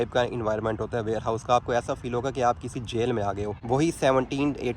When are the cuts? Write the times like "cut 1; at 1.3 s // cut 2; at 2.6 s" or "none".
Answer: cut 1; at 3.5 s